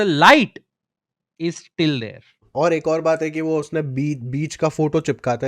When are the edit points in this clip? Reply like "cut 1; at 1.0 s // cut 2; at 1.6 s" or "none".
cut 1; at 2.4 s